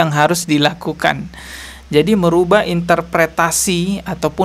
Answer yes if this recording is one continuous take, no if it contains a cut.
yes